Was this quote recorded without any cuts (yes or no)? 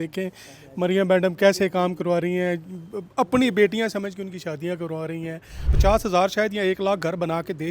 no